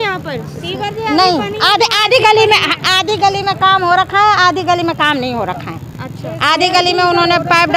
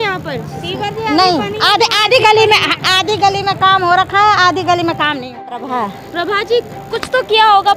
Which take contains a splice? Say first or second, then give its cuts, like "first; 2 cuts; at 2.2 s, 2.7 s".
second; 1 cut; at 5.6 s